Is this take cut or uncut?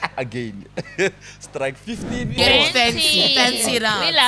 cut